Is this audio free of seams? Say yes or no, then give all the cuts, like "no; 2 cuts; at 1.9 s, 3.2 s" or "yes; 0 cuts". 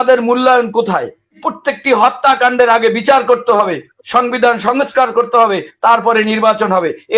no; 1 cut; at 1.4 s